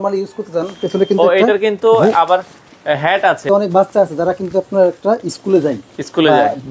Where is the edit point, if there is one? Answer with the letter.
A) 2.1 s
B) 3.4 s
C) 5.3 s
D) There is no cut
B